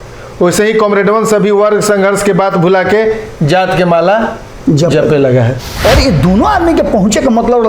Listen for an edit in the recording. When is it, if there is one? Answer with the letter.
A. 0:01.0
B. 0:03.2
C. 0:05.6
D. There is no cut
C